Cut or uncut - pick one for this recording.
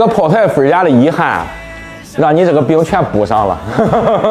uncut